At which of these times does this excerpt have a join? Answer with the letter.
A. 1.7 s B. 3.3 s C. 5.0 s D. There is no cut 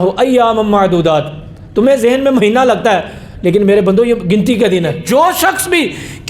C